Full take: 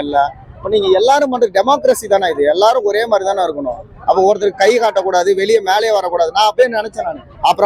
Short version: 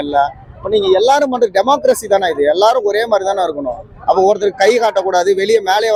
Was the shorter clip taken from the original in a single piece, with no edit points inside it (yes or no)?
yes